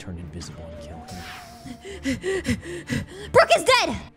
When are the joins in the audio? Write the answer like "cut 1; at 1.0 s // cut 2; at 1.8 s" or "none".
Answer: cut 1; at 1.8 s